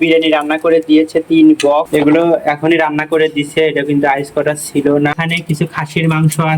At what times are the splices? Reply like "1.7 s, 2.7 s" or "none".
1.9 s, 5.1 s